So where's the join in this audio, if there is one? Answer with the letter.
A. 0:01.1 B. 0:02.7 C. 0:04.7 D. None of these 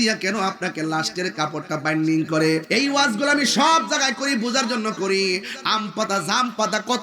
B